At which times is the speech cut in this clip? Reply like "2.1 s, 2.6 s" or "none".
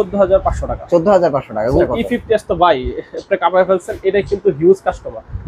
1.8 s